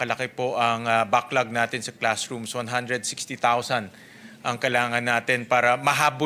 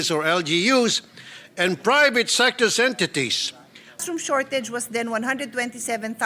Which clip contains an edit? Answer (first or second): second